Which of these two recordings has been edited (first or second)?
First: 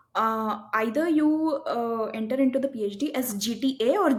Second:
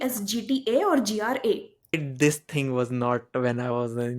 second